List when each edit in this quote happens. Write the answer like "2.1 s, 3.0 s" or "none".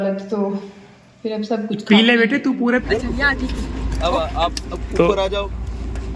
2.8 s